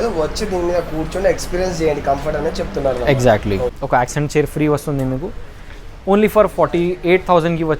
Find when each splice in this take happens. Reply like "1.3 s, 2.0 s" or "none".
3.8 s